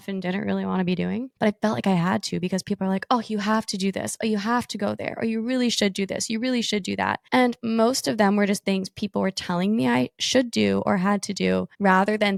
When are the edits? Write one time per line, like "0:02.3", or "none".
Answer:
none